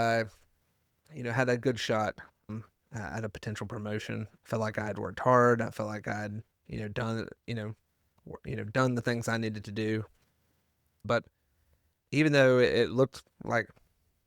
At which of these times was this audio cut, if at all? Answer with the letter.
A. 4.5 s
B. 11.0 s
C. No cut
B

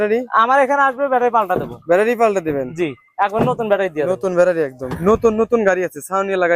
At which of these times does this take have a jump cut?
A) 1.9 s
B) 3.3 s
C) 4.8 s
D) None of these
C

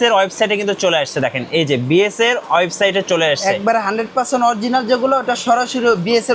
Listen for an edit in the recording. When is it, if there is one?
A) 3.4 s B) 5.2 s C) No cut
C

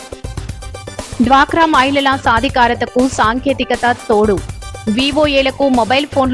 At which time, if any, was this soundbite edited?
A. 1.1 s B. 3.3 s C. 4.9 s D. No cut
A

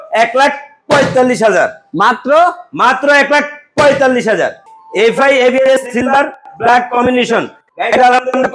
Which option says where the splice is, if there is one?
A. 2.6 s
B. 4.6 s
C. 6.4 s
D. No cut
D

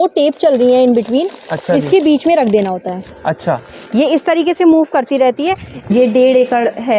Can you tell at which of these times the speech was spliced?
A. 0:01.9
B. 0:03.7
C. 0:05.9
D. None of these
C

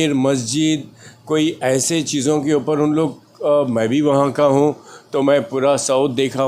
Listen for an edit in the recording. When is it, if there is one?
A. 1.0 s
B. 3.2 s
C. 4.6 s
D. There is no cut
D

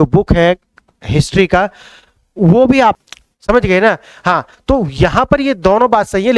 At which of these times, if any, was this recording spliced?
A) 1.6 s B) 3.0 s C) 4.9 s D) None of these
B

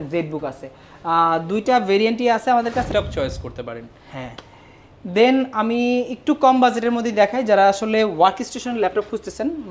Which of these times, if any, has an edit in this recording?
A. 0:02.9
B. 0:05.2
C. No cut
A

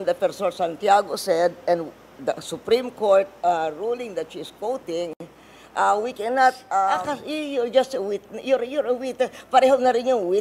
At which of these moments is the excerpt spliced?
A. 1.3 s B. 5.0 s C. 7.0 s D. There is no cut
C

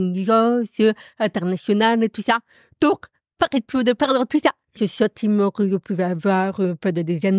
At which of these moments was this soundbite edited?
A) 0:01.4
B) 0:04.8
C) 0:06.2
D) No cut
B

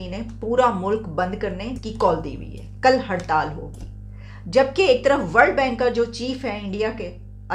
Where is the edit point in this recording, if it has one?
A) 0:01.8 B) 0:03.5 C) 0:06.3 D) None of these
A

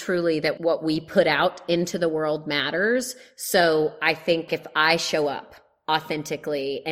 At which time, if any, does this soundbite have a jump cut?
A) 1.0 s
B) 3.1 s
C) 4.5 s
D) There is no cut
C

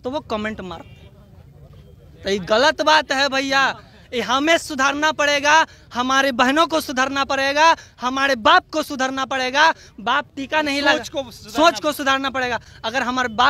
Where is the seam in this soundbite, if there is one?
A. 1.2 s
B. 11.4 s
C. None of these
C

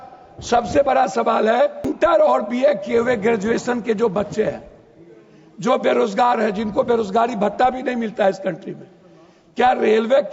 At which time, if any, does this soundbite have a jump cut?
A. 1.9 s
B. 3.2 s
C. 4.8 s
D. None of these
A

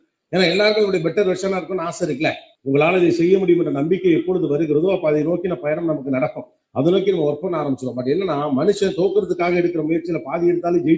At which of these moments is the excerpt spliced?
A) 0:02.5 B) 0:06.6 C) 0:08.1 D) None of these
A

